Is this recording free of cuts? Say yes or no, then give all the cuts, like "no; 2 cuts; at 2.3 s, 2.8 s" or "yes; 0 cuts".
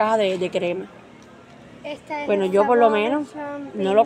yes; 0 cuts